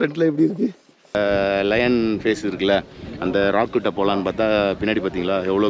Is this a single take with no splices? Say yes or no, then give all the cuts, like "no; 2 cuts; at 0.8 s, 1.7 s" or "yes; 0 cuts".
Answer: no; 1 cut; at 1.1 s